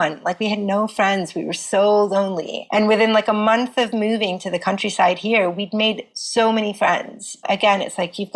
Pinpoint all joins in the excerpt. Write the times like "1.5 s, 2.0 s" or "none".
2.5 s, 7.4 s